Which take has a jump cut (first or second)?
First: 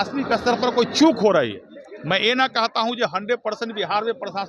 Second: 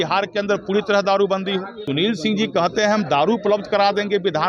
second